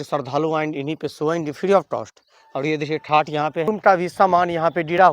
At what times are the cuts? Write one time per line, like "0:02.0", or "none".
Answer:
0:03.7